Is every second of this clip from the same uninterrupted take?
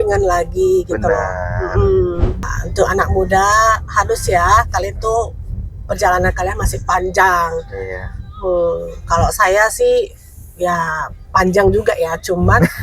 no; 1 cut; at 2.6 s

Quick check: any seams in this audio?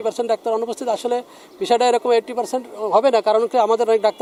no; 0 cuts

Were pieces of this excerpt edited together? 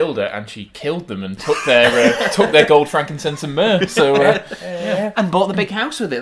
no; 0 cuts

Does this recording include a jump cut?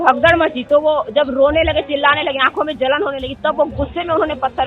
no; 0 cuts

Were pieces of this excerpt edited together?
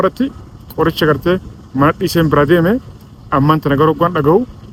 no; 0 cuts

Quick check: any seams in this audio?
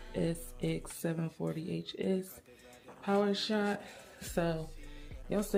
no; 0 cuts

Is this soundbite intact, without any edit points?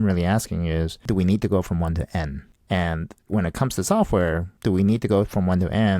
no; 4 cuts; at 1.0 s, 2.5 s, 3.1 s, 4.5 s

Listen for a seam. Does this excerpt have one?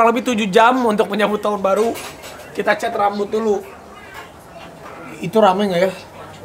no; 0 cuts

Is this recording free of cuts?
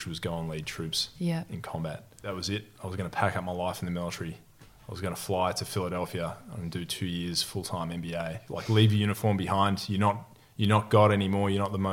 no; 2 cuts; at 2.3 s, 8.5 s

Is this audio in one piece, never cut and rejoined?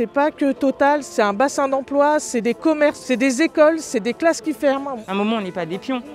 no; 3 cuts; at 1.1 s, 3.0 s, 4.9 s

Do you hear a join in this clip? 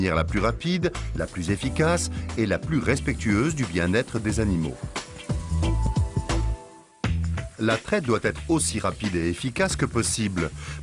no; 0 cuts

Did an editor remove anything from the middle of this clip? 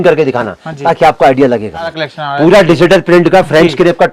yes; 1 cut; at 2.0 s

